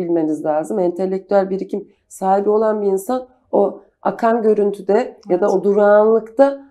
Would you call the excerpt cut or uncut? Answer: uncut